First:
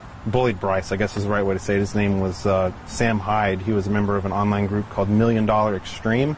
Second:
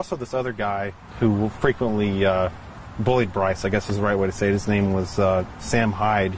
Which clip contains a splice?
second; 1 cut; at 1.0 s

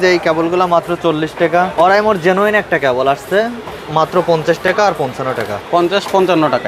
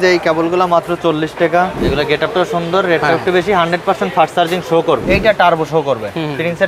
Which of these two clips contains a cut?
second; 2 cuts; at 1.7 s, 5.0 s

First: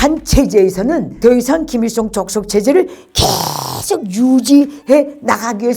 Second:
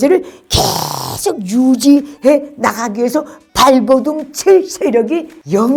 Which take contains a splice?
first; 1 cut; at 1.1 s

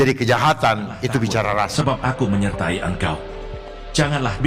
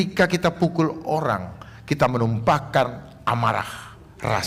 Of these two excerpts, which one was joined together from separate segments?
first; 1 cut; at 1.7 s

